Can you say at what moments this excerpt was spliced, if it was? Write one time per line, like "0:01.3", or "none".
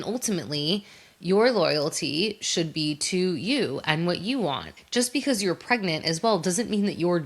0:04.7